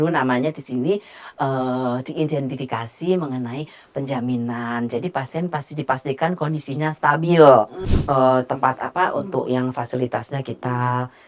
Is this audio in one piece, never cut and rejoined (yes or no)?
no